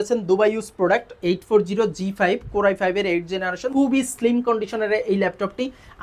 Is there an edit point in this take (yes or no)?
yes